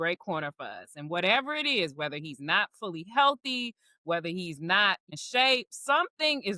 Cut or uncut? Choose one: cut